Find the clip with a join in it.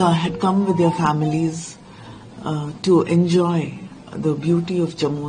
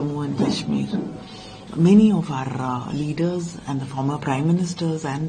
second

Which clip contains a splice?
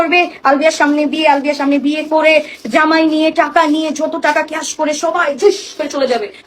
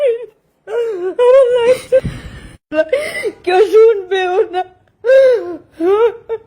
second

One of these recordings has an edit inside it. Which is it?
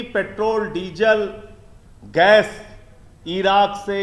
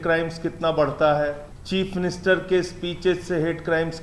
second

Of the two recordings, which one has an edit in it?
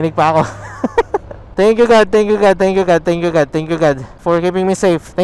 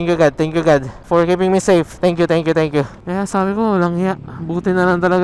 second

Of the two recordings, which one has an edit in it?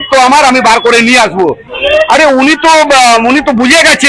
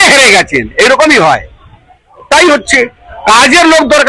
first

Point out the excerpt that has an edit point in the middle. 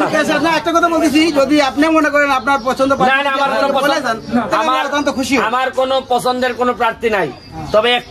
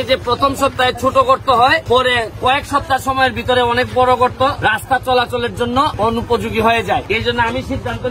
second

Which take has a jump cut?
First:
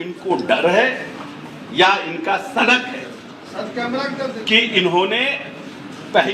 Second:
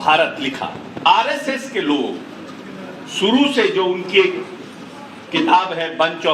second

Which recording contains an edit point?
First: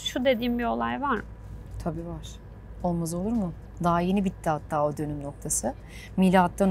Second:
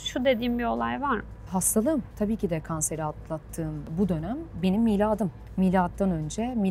second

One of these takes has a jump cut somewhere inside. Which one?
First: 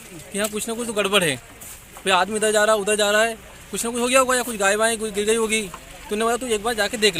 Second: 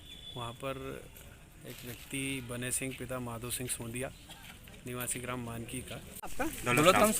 second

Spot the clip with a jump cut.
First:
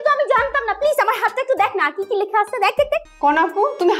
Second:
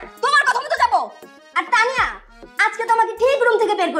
first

